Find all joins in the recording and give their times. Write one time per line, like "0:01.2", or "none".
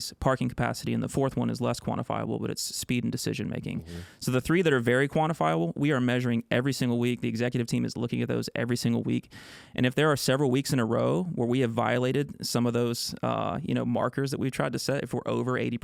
none